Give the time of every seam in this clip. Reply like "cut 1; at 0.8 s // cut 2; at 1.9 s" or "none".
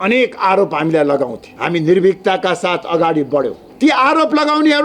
cut 1; at 1.5 s // cut 2; at 3.6 s